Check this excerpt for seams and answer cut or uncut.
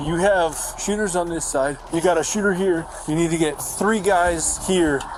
uncut